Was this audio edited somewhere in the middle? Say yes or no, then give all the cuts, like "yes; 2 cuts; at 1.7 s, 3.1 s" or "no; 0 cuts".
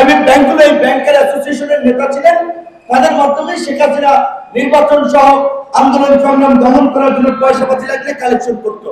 no; 0 cuts